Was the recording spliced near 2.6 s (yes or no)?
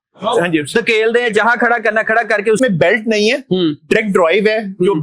yes